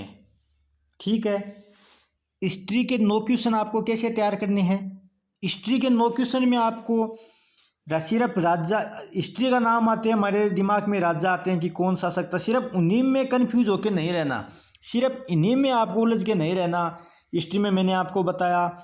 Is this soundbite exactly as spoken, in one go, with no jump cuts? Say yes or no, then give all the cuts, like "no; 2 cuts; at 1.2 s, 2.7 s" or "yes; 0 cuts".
yes; 0 cuts